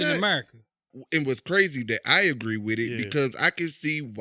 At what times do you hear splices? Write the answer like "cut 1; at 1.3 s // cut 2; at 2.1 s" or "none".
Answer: cut 1; at 0.9 s